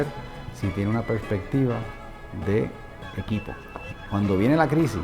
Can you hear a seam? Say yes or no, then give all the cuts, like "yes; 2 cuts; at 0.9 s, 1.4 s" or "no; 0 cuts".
yes; 2 cuts; at 2.9 s, 4.0 s